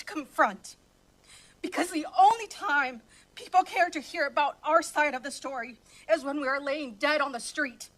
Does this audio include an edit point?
no; 0 cuts

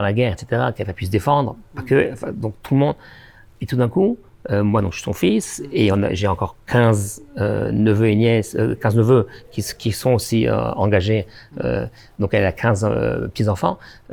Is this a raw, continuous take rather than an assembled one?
yes; 0 cuts

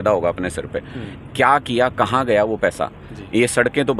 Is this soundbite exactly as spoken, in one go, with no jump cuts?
yes; 0 cuts

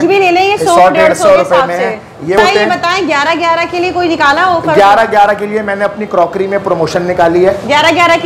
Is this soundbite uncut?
no; 1 cut; at 2.4 s

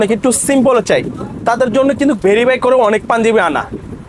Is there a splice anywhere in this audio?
no; 0 cuts

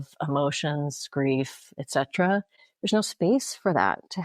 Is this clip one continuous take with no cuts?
no; 1 cut; at 2.6 s

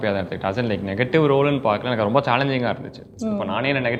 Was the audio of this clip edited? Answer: no; 0 cuts

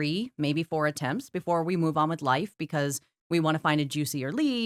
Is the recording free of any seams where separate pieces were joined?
yes; 0 cuts

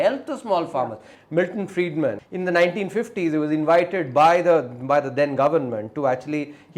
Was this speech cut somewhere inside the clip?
yes; 2 cuts; at 1.1 s, 2.2 s

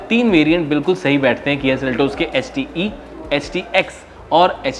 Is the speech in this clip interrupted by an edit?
no; 0 cuts

